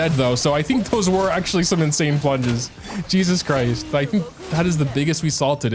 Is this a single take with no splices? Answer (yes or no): yes